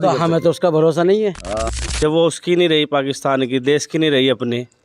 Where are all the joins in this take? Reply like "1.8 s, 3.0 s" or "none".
1.6 s